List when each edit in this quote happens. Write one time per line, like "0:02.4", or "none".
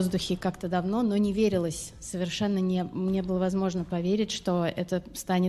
none